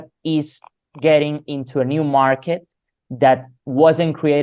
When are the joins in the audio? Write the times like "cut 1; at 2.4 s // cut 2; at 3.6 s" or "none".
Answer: none